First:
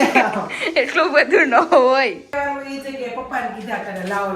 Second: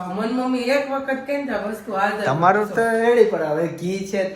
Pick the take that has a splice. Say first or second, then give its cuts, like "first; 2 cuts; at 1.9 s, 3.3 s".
first; 1 cut; at 2.3 s